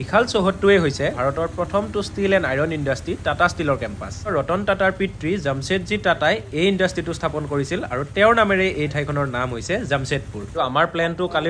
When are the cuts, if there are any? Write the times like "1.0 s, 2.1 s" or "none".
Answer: 1.2 s, 4.3 s, 10.5 s